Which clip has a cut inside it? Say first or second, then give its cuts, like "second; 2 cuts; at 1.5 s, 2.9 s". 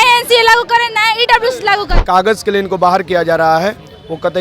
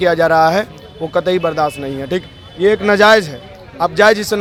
first; 1 cut; at 1.9 s